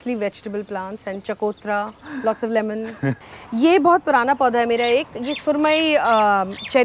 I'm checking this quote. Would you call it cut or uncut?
cut